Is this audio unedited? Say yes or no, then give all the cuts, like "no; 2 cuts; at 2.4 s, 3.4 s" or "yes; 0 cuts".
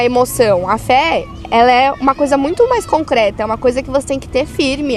yes; 0 cuts